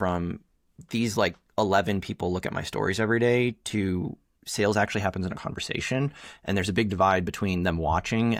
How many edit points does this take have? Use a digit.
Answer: 0